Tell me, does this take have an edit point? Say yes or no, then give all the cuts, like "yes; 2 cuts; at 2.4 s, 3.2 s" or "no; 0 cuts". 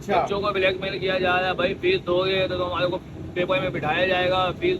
no; 0 cuts